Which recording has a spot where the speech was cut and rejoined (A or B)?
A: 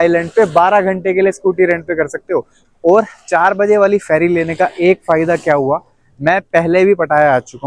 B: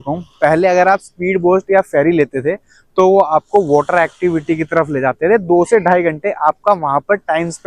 A